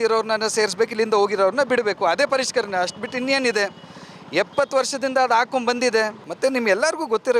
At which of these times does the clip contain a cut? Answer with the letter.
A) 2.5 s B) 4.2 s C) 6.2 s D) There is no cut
C